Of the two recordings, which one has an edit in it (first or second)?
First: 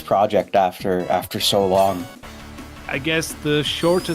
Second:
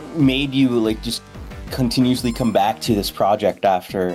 first